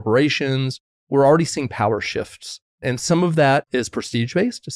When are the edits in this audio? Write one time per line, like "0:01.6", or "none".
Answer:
0:01.1
0:02.7
0:03.7